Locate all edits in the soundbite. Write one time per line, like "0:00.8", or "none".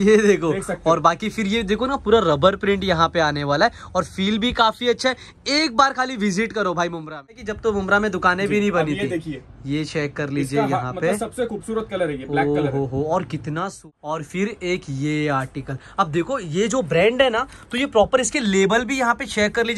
0:07.5
0:13.8